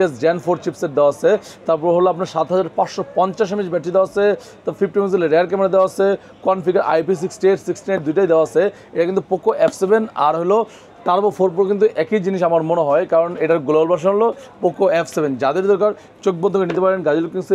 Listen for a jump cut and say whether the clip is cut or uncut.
uncut